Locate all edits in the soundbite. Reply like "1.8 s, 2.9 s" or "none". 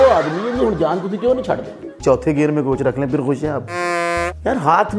1.9 s, 4.0 s